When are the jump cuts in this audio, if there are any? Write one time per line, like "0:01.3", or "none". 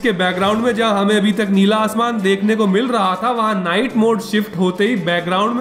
none

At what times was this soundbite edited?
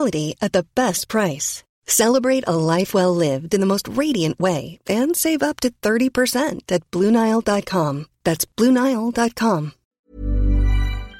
0:10.1

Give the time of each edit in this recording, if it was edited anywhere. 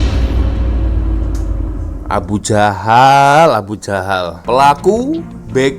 0:04.3

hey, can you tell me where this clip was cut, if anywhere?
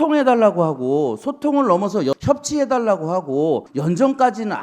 0:03.7

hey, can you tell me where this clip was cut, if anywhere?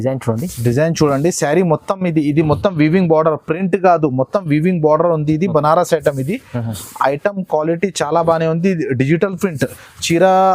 none

